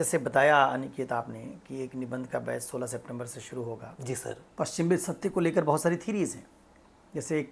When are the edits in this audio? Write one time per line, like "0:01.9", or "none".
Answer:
0:04.5